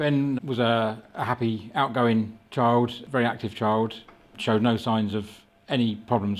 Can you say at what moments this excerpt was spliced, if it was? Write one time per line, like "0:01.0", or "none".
0:03.0
0:04.4